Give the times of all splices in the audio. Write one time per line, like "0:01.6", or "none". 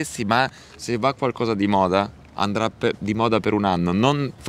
none